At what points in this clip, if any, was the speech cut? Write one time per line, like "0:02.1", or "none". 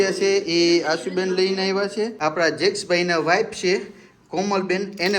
0:02.1